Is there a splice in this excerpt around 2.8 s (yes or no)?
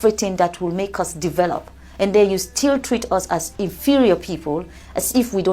no